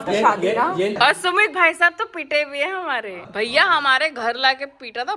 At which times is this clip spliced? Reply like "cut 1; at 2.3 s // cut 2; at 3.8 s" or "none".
cut 1; at 0.9 s // cut 2; at 3.2 s